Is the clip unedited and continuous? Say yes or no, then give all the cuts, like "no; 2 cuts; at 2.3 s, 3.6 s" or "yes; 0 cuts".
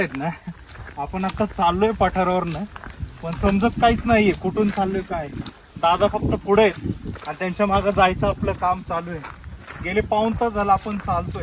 yes; 0 cuts